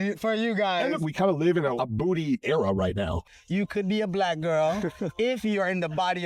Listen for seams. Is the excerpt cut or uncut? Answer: cut